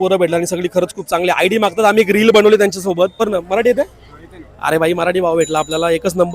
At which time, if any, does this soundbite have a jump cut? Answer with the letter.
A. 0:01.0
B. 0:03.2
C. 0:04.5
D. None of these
B